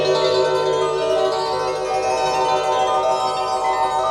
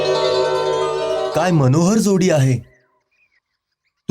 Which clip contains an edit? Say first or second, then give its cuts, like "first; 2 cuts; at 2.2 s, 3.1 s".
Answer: second; 1 cut; at 1.3 s